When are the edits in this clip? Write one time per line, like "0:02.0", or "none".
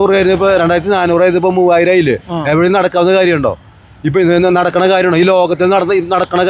none